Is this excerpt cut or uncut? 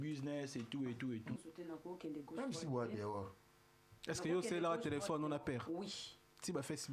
cut